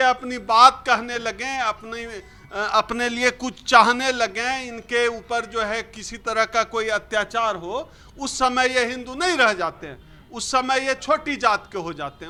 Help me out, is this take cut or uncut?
uncut